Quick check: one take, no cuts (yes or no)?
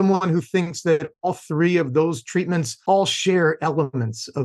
no